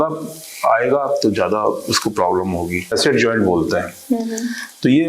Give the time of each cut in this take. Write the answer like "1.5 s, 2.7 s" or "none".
2.9 s